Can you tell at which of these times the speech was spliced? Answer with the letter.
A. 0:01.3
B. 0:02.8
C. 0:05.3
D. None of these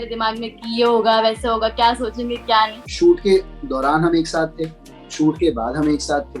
B